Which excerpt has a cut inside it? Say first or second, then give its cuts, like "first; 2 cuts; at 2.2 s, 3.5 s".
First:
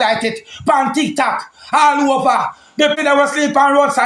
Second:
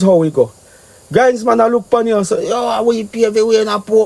first; 1 cut; at 3.0 s